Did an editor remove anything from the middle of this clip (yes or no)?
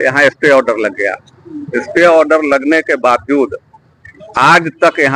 no